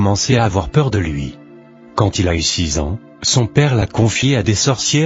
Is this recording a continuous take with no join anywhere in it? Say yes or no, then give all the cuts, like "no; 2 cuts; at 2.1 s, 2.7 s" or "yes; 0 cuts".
no; 1 cut; at 2.4 s